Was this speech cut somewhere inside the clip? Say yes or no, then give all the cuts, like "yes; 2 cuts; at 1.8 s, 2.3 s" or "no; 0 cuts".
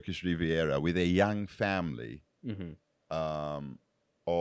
no; 0 cuts